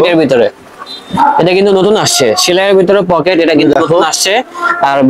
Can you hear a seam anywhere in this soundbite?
no; 0 cuts

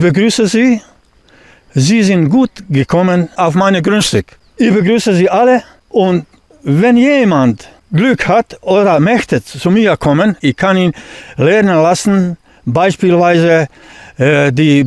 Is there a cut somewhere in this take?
yes; 5 cuts; at 3.3 s, 4.4 s, 5.8 s, 7.7 s, 10.4 s

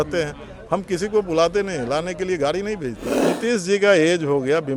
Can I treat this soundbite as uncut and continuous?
no; 1 cut; at 3.1 s

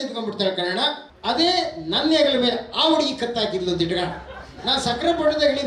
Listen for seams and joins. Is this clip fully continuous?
no; 1 cut; at 1.1 s

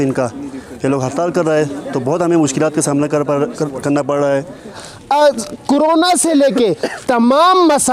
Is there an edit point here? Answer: yes; 1 cut; at 4.9 s

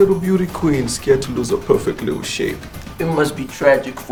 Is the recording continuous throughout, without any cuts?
yes; 0 cuts

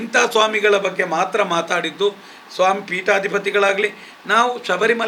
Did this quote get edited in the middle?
no; 0 cuts

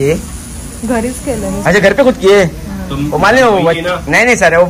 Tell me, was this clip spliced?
yes; 1 cut; at 1.6 s

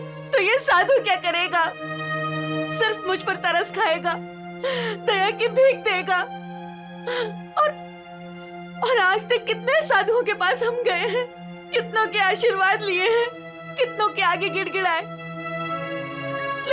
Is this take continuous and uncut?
yes; 0 cuts

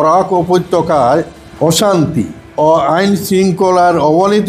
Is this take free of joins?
no; 2 cuts; at 1.4 s, 2.4 s

